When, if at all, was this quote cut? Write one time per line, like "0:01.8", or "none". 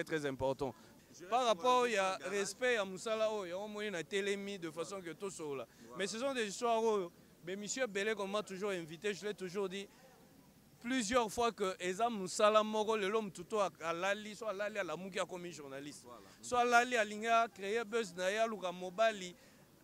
0:00.9